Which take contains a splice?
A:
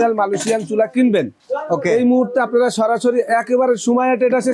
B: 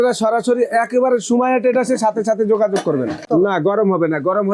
B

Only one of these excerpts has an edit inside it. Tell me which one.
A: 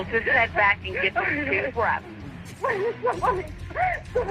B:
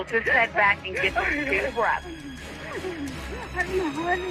A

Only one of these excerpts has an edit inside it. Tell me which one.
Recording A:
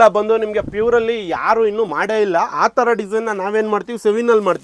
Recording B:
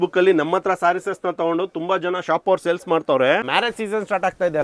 B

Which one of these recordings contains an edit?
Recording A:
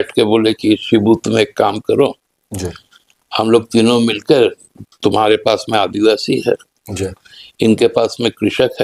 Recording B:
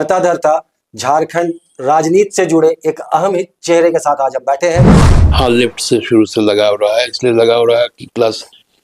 B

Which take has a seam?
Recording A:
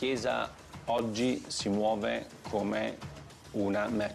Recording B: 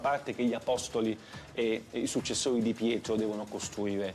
A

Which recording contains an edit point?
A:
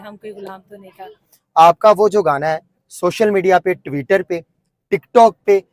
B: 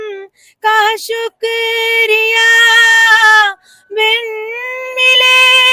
A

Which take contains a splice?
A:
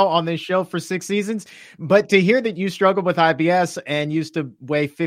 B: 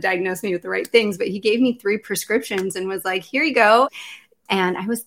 B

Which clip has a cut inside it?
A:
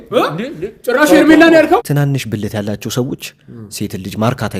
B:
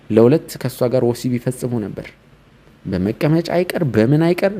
A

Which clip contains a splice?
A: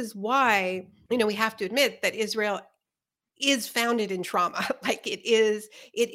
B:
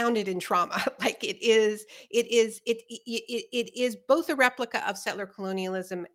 A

